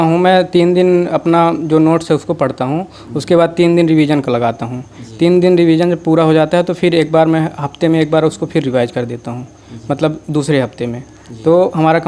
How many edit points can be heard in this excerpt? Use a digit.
0